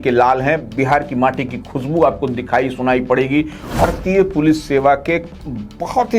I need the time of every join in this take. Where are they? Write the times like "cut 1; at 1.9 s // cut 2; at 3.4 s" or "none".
cut 1; at 3.8 s